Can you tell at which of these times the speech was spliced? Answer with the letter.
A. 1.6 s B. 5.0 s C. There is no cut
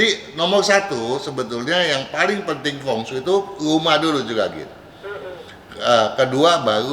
C